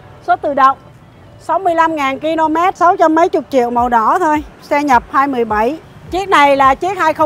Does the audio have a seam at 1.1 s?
no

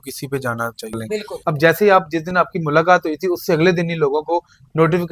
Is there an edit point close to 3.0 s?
no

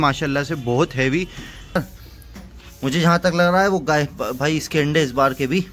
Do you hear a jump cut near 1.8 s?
yes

